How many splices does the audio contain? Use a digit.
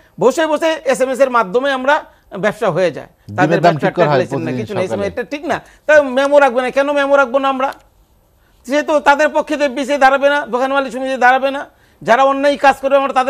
0